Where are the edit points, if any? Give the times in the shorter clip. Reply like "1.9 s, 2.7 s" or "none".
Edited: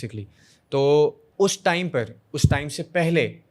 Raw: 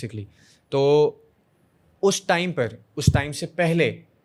1.2 s